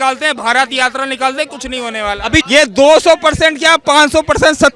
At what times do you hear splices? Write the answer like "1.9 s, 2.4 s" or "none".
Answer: 2.5 s